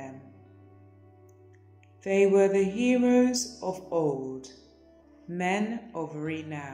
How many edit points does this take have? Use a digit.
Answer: 0